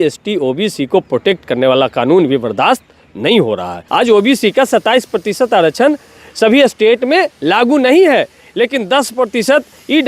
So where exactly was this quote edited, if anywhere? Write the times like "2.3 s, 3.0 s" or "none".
3.8 s